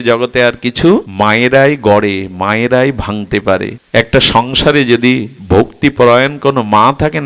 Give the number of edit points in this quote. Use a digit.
2